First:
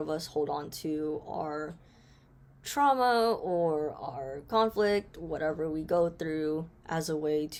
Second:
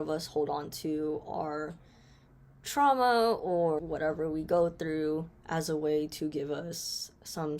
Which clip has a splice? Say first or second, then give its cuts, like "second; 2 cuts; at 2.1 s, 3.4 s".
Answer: second; 1 cut; at 3.8 s